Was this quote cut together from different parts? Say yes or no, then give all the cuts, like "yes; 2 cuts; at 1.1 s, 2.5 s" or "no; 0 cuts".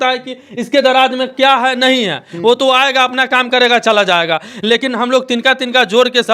no; 0 cuts